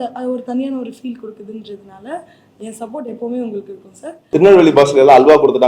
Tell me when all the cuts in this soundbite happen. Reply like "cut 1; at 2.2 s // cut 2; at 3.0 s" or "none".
cut 1; at 4.3 s